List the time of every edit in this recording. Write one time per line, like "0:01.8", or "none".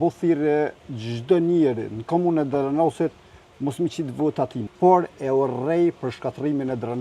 0:04.6